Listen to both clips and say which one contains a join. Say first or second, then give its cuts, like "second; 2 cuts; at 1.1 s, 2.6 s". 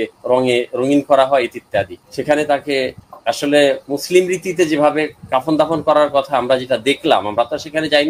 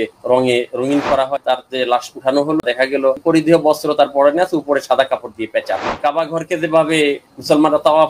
second; 3 cuts; at 1.4 s, 3.1 s, 6.0 s